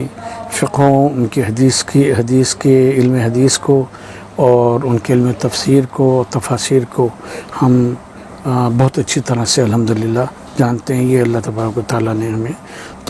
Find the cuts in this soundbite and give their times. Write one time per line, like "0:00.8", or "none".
none